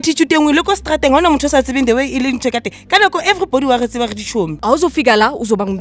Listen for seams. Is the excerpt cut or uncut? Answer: cut